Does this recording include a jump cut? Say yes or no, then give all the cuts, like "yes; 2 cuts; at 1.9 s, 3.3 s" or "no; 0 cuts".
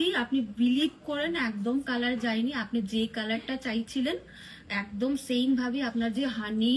no; 0 cuts